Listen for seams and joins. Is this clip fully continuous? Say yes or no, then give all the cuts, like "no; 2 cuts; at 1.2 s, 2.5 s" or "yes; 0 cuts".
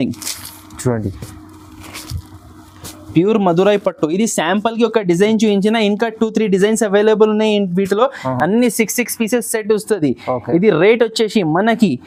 yes; 0 cuts